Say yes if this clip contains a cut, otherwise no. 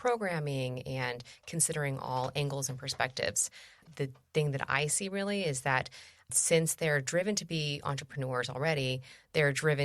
yes